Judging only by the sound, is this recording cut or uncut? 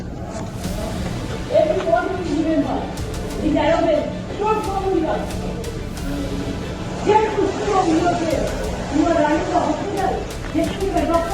uncut